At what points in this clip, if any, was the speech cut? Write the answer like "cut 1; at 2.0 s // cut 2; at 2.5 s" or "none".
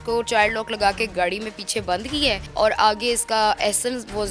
cut 1; at 2.5 s